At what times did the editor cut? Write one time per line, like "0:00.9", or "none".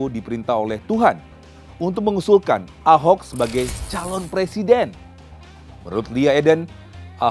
none